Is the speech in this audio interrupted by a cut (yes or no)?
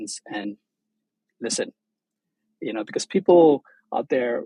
no